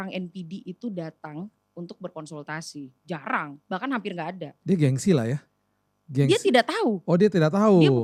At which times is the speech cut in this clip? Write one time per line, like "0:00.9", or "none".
none